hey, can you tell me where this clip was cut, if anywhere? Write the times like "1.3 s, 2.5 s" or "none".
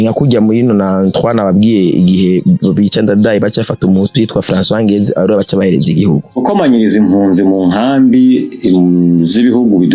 6.4 s